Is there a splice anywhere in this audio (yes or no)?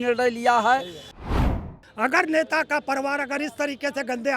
yes